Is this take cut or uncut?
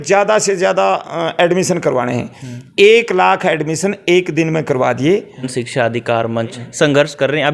cut